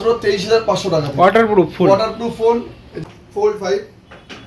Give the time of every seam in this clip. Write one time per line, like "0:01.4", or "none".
0:02.9